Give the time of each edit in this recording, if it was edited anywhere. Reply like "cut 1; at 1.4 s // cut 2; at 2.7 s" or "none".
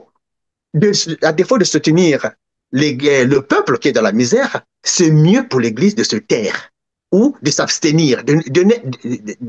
none